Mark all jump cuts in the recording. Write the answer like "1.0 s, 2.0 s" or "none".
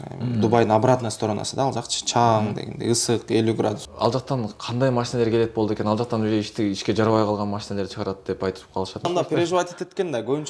3.9 s, 9.1 s